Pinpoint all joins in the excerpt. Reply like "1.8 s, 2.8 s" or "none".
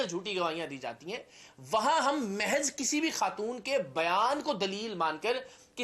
none